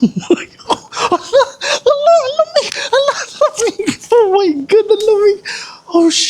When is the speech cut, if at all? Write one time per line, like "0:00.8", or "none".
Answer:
none